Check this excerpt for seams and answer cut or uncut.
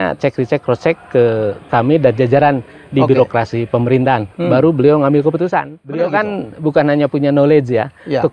cut